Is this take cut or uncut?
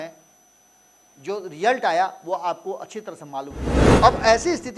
cut